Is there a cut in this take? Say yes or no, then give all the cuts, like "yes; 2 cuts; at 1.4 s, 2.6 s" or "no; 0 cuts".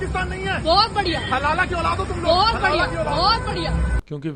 no; 0 cuts